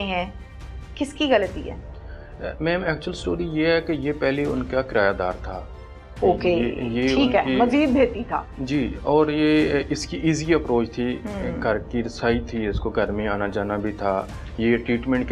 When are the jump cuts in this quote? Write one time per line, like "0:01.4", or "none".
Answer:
none